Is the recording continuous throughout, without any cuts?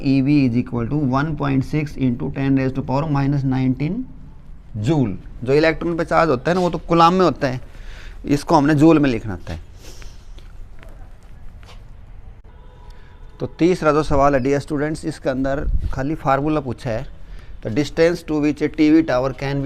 yes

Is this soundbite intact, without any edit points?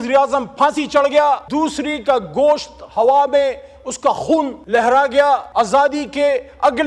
no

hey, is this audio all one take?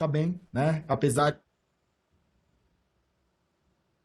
yes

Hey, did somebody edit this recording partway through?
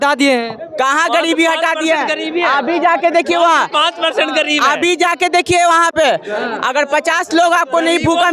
no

